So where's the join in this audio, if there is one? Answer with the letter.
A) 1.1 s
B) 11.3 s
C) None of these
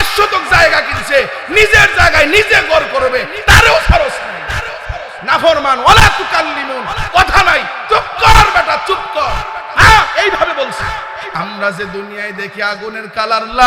B